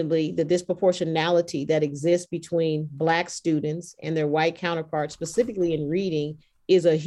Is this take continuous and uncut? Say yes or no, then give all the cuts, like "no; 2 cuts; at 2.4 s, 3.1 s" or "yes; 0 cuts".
yes; 0 cuts